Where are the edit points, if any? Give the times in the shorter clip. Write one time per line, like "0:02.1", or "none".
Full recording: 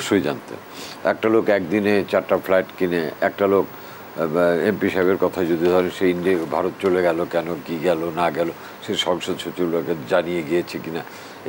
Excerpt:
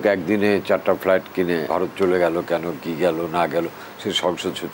0:01.7

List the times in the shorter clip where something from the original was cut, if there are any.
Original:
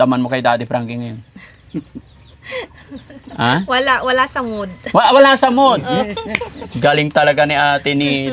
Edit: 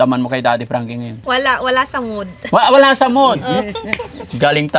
0:01.2

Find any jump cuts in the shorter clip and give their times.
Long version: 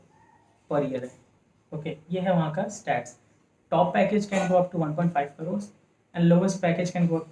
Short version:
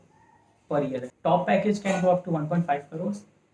0:01.1

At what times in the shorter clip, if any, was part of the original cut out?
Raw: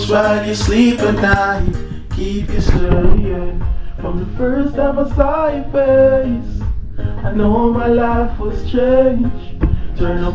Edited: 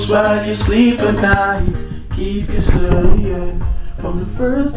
none

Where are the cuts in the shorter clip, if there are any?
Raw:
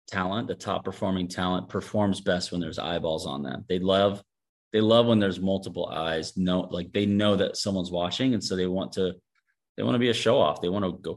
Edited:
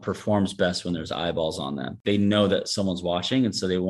0:02.0

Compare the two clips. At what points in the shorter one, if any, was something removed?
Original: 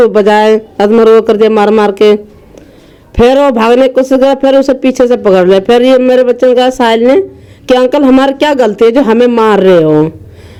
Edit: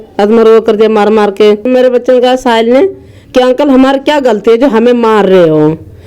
0:01.7

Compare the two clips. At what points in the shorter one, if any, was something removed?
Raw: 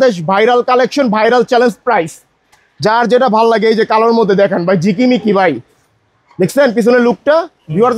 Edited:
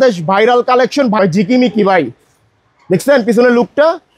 0:01.2

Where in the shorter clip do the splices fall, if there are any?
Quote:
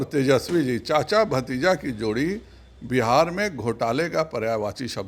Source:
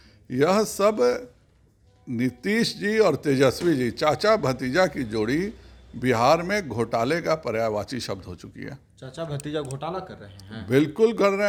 none

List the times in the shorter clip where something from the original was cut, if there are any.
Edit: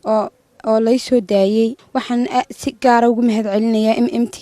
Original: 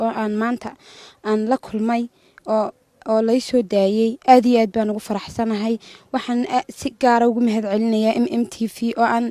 0:01.8

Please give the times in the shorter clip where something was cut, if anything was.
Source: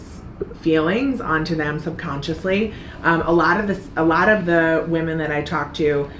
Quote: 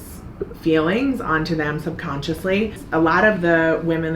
0:02.8

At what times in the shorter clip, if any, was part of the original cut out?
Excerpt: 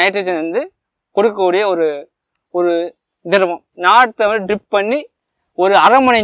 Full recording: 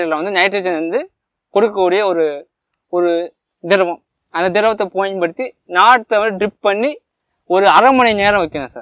0:03.7

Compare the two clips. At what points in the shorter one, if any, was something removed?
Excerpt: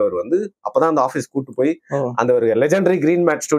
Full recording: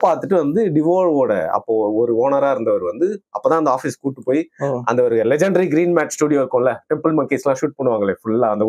none

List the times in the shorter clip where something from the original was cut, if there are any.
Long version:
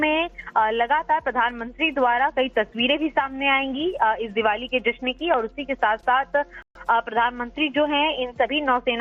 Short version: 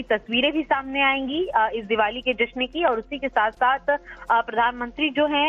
0:04.1

